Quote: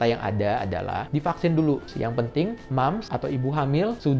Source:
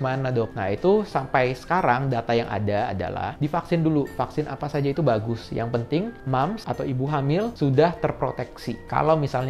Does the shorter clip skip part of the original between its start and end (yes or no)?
yes